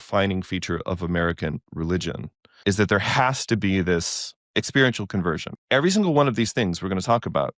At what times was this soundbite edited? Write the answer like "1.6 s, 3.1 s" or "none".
2.5 s, 4.4 s, 5.5 s